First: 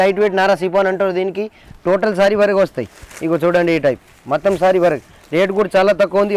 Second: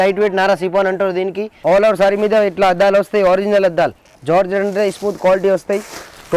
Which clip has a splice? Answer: second; 2 cuts; at 1.5 s, 4.1 s

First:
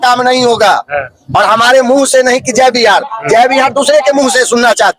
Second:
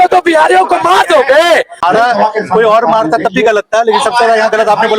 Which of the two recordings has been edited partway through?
second; 1 cut; at 1.8 s

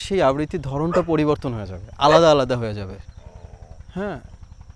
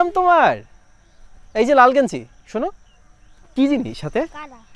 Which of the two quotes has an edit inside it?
second; 1 cut; at 3.5 s

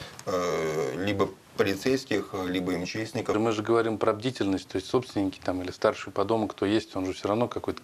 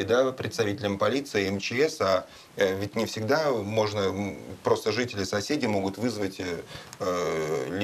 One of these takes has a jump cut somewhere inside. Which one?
first; 1 cut; at 3.3 s

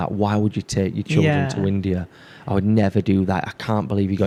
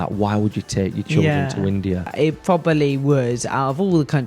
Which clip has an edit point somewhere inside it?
second; 1 cut; at 2.1 s

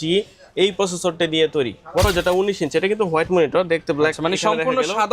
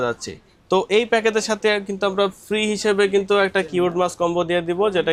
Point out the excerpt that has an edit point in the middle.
first; 1 cut; at 2.1 s

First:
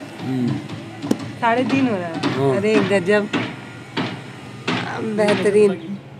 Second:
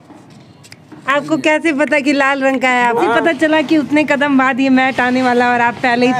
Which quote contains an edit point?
second; 1 cut; at 3.0 s

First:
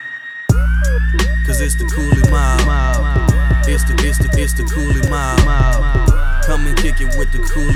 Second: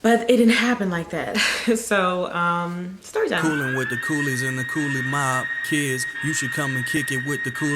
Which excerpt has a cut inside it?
second; 1 cut; at 3.4 s

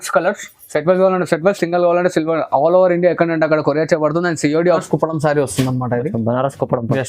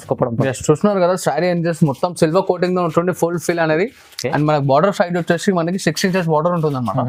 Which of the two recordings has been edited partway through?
first; 1 cut; at 4.8 s

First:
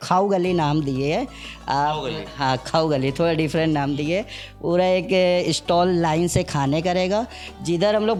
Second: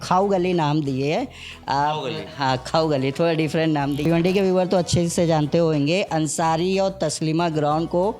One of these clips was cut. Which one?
second; 1 cut; at 4.0 s

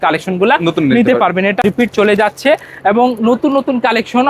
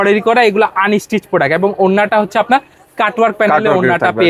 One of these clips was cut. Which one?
first; 1 cut; at 1.6 s

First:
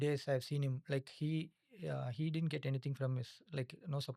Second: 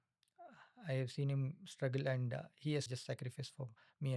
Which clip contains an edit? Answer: second; 1 cut; at 2.9 s

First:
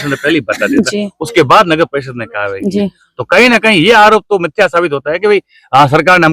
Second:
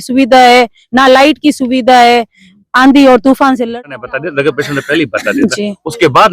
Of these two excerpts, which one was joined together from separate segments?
second; 1 cut; at 3.7 s

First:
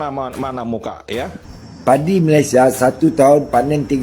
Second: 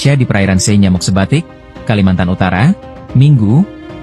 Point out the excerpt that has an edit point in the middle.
first; 1 cut; at 1.4 s

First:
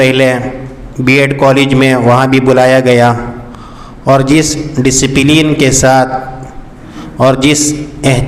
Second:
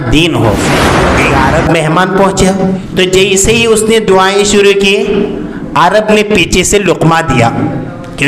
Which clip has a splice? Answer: second; 2 cuts; at 1.0 s, 2.8 s

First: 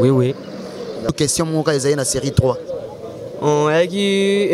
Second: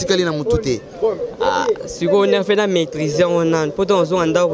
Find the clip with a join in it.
first; 1 cut; at 1.1 s

